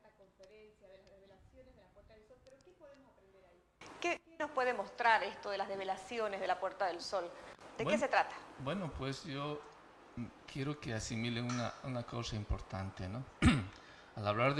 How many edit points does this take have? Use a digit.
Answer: 1